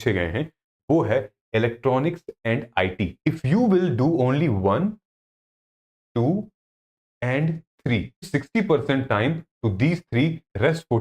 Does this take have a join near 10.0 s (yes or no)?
no